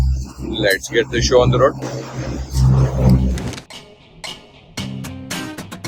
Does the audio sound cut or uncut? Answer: uncut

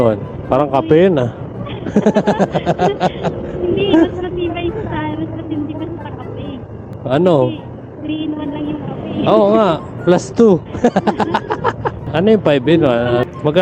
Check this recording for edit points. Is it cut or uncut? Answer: uncut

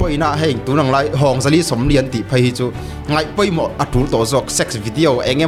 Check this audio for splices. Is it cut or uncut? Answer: uncut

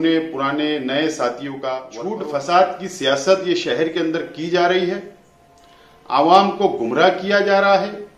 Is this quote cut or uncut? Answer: cut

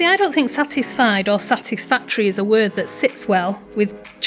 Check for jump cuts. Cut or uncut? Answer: uncut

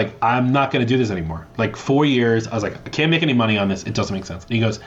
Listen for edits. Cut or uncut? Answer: uncut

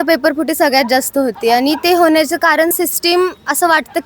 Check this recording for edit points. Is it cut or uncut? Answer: uncut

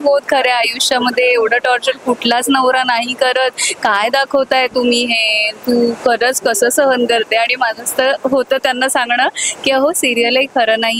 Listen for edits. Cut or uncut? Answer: uncut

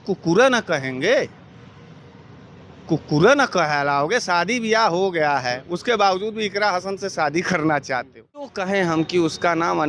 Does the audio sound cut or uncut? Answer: cut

